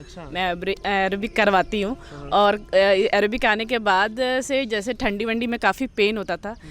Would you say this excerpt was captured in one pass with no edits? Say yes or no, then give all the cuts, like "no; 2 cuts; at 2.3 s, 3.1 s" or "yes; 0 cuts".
yes; 0 cuts